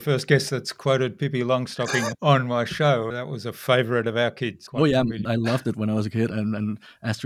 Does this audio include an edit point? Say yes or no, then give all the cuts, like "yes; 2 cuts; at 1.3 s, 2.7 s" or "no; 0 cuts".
yes; 5 cuts; at 2.1 s, 3.2 s, 4.6 s, 5.2 s, 6.3 s